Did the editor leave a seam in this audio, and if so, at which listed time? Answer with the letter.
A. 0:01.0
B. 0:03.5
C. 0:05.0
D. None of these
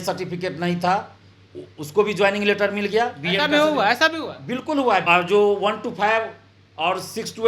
C